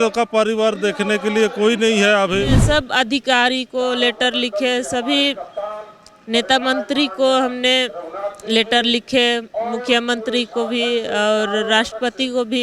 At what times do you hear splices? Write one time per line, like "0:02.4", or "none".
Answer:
0:02.6